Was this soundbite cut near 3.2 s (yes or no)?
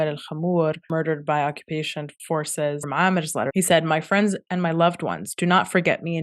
yes